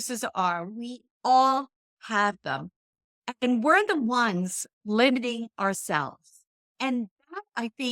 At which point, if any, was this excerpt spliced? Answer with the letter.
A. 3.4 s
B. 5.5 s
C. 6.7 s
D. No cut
C